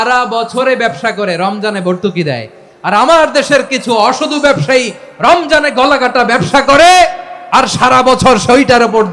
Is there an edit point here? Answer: no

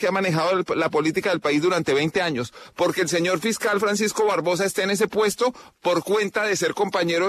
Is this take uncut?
yes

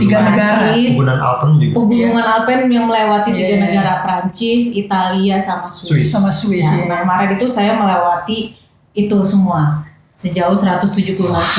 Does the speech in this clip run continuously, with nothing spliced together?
yes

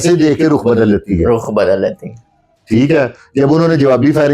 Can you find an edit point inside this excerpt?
no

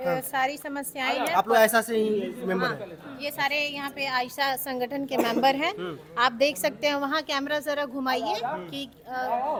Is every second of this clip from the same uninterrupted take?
yes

